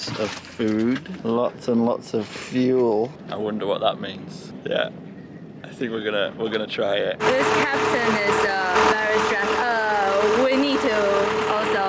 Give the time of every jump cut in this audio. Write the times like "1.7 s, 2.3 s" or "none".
1.1 s, 3.2 s, 4.5 s, 7.2 s, 8.8 s